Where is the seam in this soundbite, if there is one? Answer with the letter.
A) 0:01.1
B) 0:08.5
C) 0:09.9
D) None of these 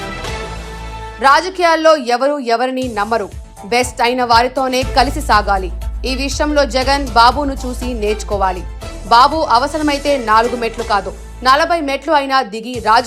A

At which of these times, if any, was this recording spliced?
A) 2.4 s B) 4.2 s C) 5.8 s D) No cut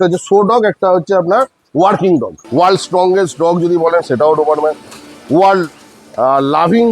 A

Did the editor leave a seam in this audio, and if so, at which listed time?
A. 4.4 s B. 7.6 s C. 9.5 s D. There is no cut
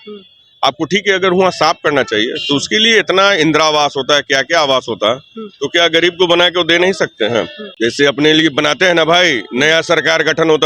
B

